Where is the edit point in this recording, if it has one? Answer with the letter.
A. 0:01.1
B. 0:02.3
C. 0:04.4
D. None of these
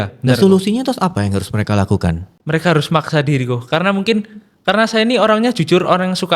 B